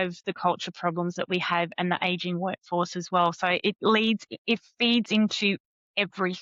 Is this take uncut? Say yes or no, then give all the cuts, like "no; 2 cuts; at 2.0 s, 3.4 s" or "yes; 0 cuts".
yes; 0 cuts